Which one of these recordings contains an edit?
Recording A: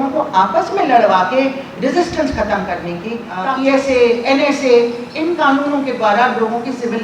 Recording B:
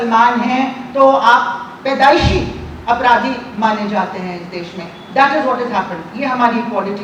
A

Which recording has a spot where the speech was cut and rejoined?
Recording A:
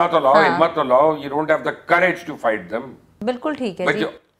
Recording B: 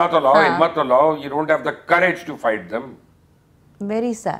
A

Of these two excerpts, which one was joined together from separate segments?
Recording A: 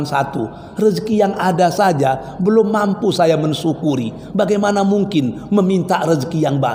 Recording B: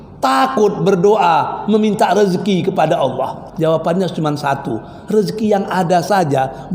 B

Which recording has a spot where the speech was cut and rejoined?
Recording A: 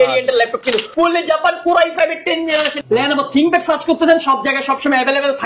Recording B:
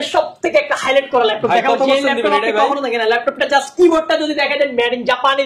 A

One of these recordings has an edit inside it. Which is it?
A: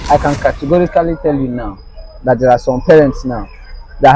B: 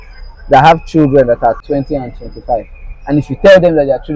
B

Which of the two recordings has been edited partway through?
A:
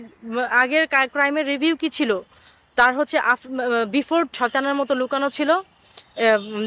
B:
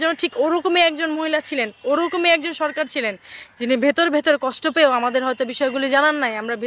A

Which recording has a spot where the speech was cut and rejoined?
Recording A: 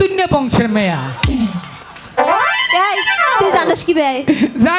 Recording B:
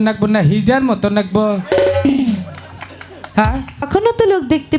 B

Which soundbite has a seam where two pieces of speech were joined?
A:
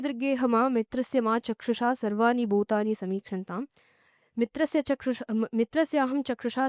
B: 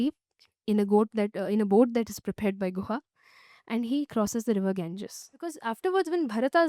B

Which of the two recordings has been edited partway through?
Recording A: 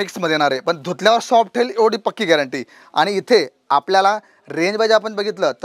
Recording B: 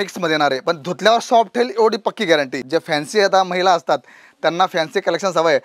B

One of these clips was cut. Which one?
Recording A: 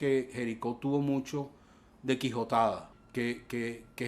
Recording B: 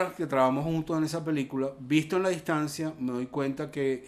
A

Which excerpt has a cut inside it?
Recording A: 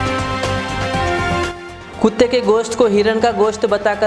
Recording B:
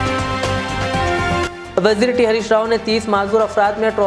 B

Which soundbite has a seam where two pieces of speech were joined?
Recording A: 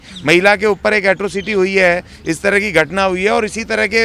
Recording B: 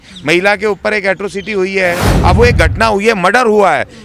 B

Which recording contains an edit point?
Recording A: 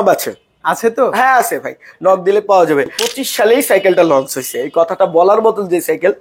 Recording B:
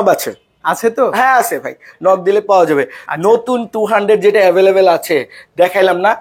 A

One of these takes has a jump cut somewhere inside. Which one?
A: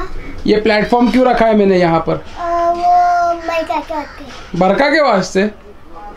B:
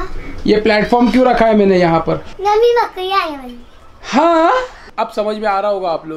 B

